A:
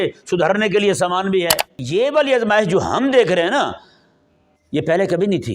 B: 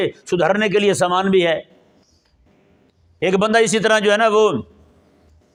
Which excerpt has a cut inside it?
A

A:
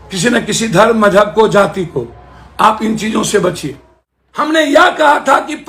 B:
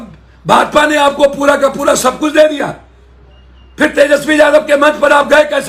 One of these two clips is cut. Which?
A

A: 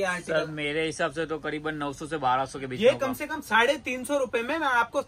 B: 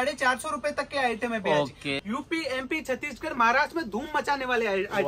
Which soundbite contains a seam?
B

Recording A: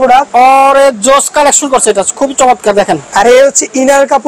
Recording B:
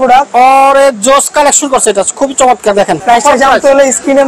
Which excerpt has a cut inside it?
B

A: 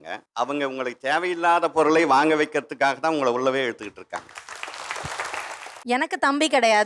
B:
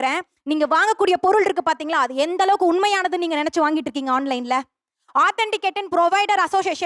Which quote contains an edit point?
A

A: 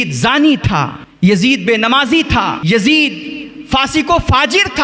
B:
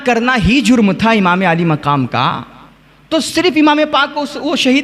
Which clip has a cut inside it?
A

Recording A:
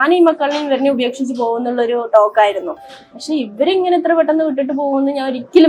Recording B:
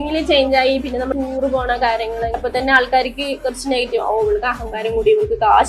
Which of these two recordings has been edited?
B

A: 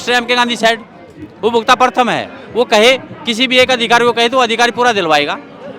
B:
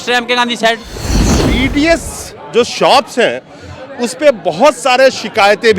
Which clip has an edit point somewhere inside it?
B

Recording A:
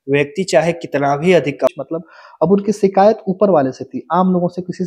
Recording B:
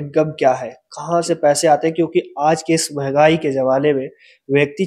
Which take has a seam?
A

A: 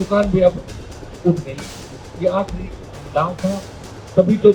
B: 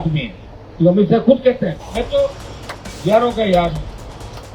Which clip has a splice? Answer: B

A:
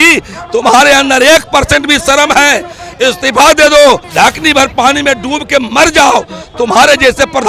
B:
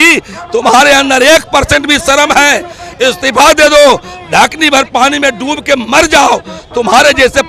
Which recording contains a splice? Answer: A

